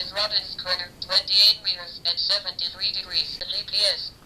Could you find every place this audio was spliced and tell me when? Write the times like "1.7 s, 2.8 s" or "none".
3.3 s